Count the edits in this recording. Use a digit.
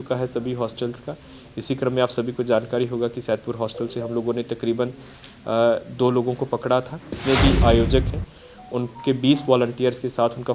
1